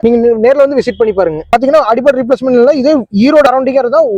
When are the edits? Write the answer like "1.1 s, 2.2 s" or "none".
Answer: 1.5 s